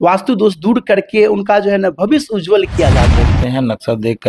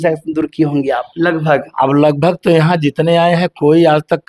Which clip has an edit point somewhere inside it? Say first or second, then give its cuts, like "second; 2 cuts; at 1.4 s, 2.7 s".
first; 1 cut; at 3.2 s